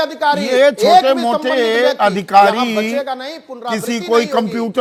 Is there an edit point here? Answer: no; 0 cuts

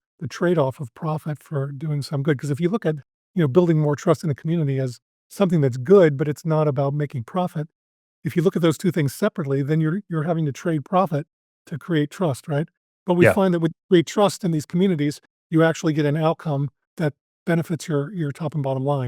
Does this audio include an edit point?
yes; 1 cut; at 16.8 s

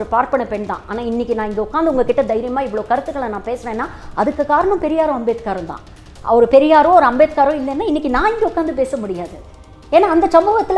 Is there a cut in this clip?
no; 0 cuts

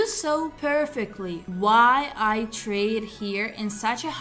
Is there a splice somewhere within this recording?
no; 0 cuts

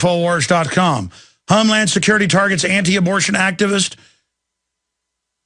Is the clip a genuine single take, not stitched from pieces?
yes; 0 cuts

